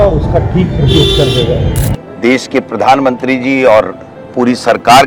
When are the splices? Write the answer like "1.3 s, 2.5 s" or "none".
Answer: 1.9 s